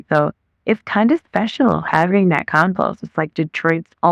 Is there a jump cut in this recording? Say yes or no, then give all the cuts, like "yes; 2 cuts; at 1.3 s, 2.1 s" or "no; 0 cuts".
no; 0 cuts